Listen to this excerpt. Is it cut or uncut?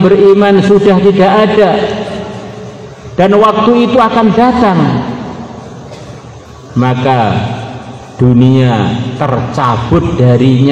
uncut